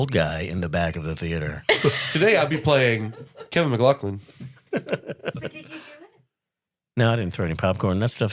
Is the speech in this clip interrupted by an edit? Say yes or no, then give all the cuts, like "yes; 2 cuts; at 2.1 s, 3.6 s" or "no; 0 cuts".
no; 0 cuts